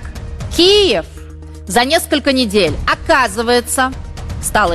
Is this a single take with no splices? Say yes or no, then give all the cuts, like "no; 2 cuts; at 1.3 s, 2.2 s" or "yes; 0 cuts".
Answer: yes; 0 cuts